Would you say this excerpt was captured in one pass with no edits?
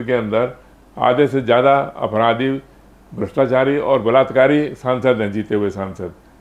yes; 0 cuts

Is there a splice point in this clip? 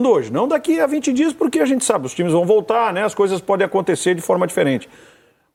no; 0 cuts

